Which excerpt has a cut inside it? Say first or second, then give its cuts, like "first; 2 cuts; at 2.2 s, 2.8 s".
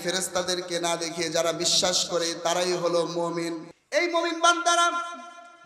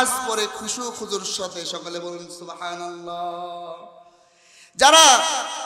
first; 1 cut; at 3.7 s